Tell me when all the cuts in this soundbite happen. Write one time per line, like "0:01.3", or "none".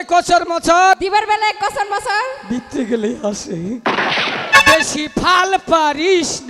0:01.0
0:03.8